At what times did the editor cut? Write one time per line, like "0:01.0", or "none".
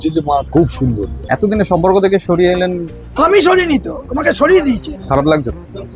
0:01.2
0:04.9

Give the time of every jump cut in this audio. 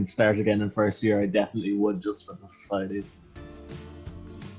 0:03.2

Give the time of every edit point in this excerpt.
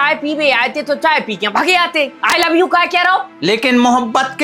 0:03.3

